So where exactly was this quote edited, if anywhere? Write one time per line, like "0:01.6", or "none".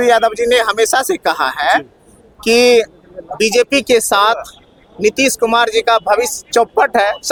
none